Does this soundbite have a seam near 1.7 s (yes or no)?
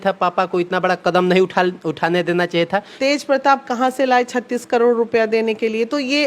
no